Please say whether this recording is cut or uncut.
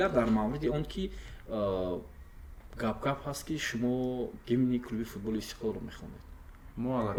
uncut